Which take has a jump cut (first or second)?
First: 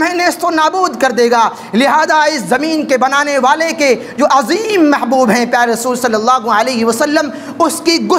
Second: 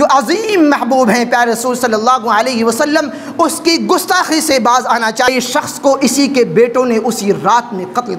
second